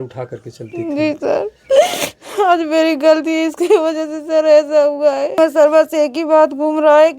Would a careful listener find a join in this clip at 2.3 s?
no; 1 cut; at 5.4 s

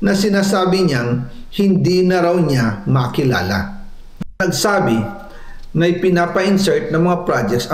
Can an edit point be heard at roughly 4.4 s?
yes; 1 cut; at 4.4 s

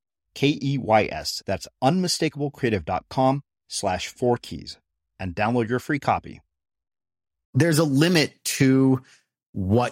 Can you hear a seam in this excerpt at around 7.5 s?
yes; 1 cut; at 7.5 s

